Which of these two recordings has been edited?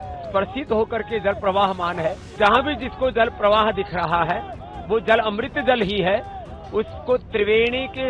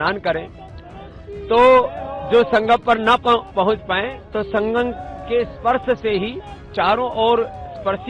first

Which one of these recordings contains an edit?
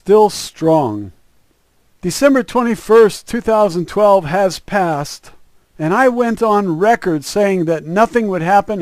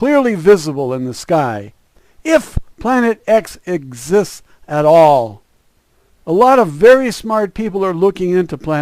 second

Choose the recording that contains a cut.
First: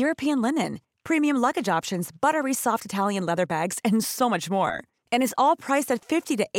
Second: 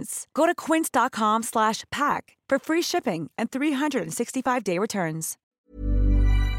second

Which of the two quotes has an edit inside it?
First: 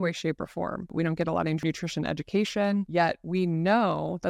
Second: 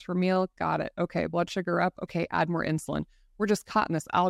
first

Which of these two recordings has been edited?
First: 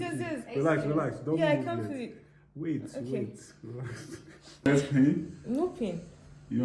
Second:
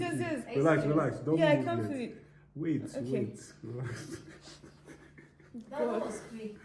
first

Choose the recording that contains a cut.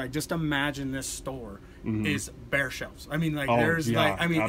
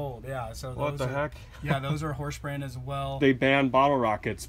second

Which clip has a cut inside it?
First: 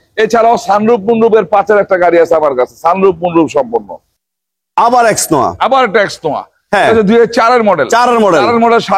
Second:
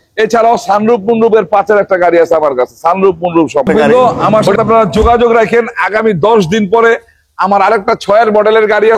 second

